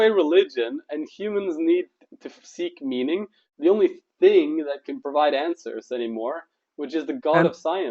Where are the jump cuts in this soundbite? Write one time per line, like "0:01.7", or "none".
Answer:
0:03.4